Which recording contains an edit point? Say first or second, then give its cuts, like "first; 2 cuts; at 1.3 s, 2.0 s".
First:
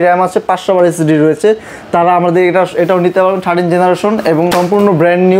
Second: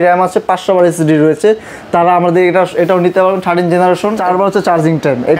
second; 1 cut; at 4.1 s